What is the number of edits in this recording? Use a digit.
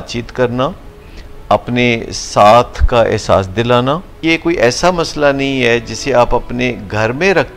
1